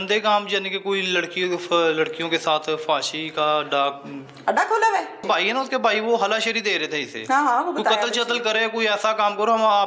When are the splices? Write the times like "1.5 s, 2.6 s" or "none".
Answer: 5.2 s